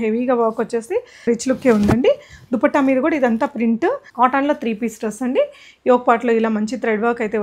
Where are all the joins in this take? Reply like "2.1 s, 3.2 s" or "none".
1.2 s, 4.0 s